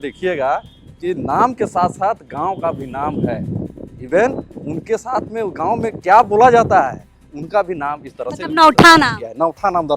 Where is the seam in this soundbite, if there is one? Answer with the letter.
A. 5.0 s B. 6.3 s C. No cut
C